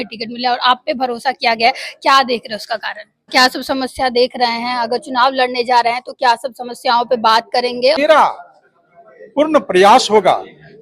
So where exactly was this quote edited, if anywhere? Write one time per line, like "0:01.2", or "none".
0:03.3
0:08.0